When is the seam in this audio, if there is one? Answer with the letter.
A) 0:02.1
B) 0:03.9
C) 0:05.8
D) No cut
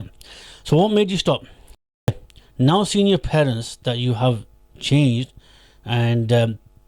A